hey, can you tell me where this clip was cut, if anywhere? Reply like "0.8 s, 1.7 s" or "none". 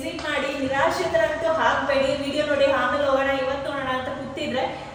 none